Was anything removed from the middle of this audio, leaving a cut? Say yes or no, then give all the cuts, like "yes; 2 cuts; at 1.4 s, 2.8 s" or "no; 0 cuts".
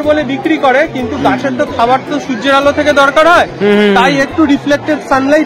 no; 0 cuts